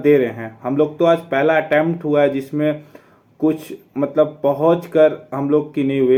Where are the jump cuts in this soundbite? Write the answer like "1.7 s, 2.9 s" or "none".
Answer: none